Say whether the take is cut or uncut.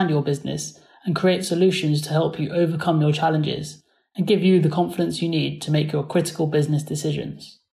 uncut